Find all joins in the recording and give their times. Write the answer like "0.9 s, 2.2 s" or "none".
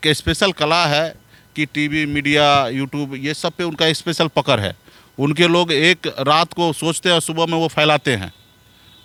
none